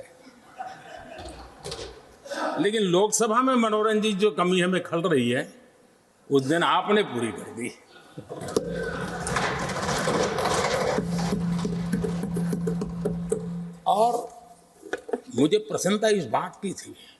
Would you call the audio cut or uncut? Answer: uncut